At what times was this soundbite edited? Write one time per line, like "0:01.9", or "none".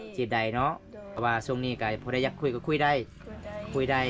0:01.0